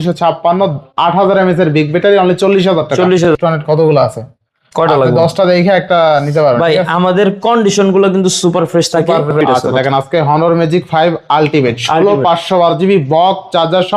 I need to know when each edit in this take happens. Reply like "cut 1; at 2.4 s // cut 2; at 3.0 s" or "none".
cut 1; at 3.3 s // cut 2; at 9.4 s